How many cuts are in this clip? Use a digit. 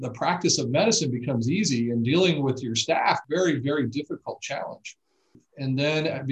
1